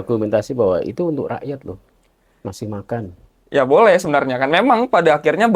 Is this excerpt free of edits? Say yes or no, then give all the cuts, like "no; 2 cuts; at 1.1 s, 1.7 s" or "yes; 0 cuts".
yes; 0 cuts